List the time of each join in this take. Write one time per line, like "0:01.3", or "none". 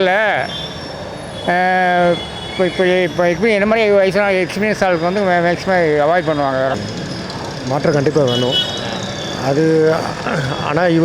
none